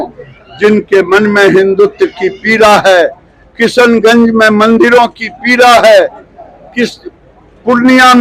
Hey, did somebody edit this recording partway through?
no; 0 cuts

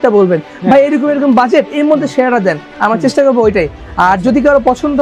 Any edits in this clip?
no; 0 cuts

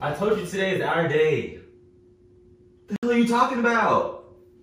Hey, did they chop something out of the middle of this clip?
no; 0 cuts

